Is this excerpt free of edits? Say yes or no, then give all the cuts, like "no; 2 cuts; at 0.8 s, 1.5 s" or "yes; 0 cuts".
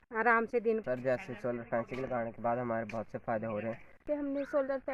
no; 2 cuts; at 0.8 s, 4.0 s